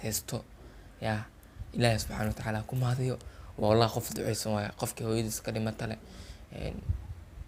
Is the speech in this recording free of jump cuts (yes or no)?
yes